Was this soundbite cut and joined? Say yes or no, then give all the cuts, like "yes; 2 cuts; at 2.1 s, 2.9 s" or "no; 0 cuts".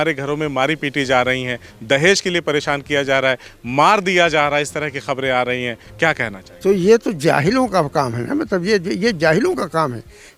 no; 0 cuts